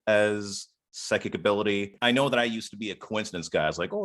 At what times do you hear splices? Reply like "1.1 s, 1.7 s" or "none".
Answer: 1.9 s